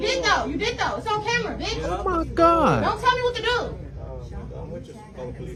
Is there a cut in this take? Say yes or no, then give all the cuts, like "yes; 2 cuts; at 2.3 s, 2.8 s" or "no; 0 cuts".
no; 0 cuts